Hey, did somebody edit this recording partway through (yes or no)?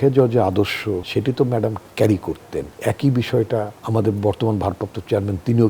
yes